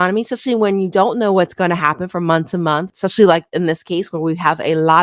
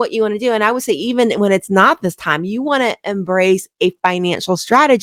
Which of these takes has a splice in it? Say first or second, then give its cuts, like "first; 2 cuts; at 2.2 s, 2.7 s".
first; 1 cut; at 2.9 s